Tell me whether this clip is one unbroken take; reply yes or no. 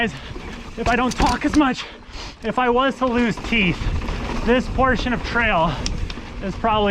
yes